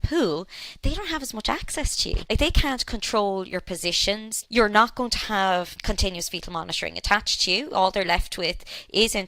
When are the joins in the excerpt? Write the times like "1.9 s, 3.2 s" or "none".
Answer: 2.2 s, 4.3 s, 5.8 s